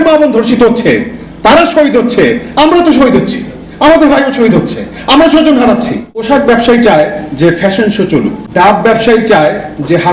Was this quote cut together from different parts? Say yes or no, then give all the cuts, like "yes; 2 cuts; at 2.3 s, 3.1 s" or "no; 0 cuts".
yes; 2 cuts; at 6.2 s, 8.4 s